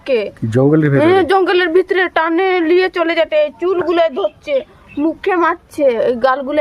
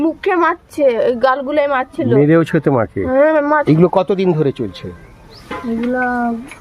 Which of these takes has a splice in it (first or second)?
second